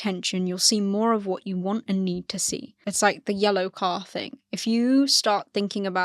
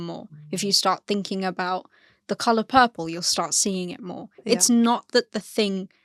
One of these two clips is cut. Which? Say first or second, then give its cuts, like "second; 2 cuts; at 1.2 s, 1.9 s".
first; 1 cut; at 2.8 s